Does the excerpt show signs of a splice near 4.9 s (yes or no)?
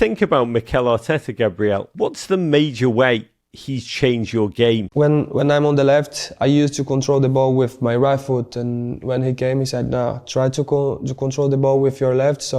yes